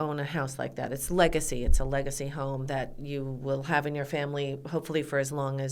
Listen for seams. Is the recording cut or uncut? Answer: uncut